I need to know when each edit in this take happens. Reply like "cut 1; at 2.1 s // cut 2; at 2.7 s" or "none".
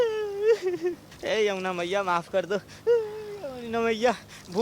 cut 1; at 1.1 s